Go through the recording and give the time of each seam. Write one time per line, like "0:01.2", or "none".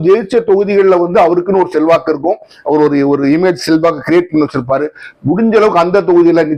none